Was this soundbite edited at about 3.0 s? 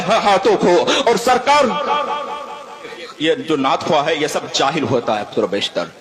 yes; 1 cut; at 3.0 s

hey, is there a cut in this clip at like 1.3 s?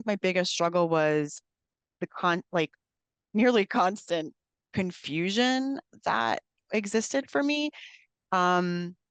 no; 0 cuts

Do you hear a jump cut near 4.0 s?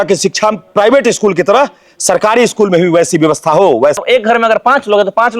yes; 1 cut; at 4.0 s

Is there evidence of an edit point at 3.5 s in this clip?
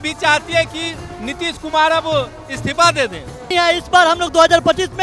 yes; 1 cut; at 3.5 s

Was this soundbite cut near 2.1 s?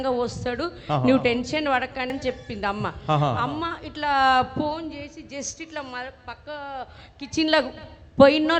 yes; 1 cut; at 2.1 s

